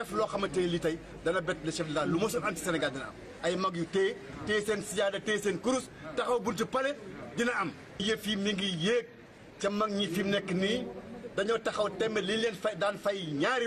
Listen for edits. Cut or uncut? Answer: cut